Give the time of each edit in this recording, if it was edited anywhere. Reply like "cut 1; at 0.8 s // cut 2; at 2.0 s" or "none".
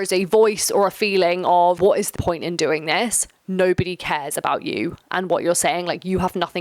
cut 1; at 2.1 s